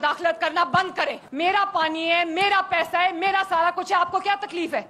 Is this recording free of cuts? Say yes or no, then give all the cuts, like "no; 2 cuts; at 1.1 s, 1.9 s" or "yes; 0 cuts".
yes; 0 cuts